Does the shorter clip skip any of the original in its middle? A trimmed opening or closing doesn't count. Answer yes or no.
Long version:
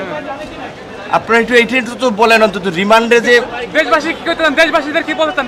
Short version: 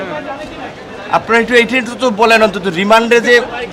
no